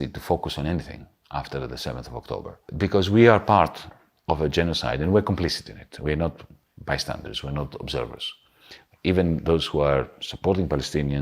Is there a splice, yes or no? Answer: yes